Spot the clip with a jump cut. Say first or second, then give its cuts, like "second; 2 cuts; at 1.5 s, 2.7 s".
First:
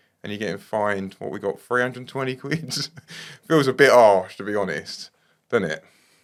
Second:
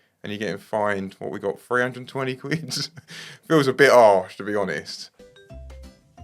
second; 1 cut; at 5.3 s